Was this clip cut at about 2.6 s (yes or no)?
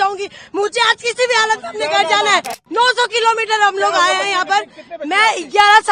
yes